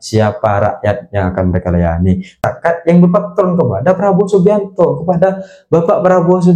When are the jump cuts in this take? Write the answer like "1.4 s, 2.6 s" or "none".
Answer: 2.5 s